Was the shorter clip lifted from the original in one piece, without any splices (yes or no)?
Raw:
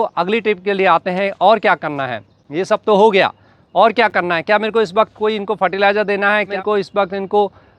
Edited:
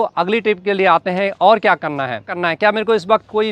no